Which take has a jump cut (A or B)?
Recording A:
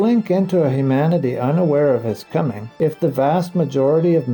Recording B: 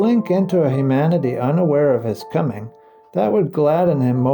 A